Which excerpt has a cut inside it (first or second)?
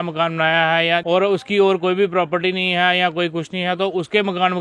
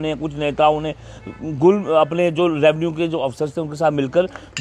first